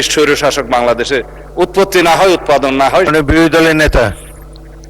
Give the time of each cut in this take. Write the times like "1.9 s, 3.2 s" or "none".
3.1 s